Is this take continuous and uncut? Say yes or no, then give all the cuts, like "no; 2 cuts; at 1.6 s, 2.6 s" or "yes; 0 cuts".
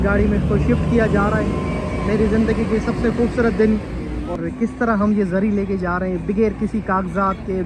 no; 1 cut; at 4.3 s